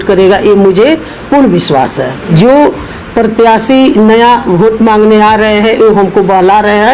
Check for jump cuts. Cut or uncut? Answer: cut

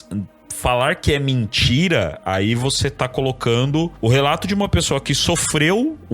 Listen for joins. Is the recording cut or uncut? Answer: cut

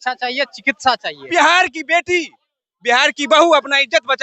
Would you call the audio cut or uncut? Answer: cut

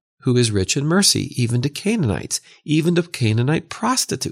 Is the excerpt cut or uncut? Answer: uncut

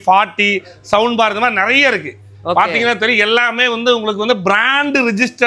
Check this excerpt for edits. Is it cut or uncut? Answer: uncut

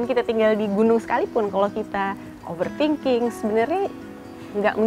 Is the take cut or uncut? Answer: cut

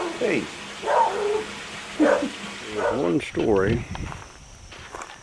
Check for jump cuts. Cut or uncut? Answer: cut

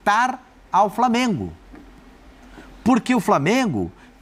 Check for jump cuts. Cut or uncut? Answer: uncut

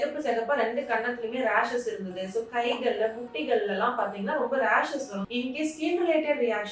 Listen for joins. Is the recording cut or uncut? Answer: cut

